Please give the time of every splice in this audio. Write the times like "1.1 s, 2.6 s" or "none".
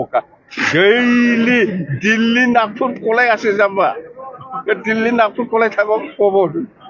none